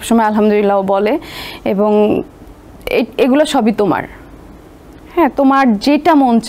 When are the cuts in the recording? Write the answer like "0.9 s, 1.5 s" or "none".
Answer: none